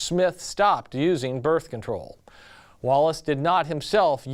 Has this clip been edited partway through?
no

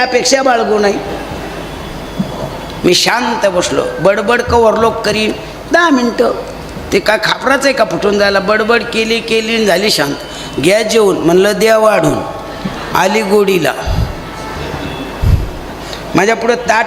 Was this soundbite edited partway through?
no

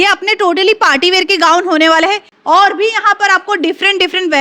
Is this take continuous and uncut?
no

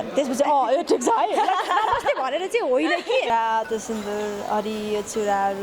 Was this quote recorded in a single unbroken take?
no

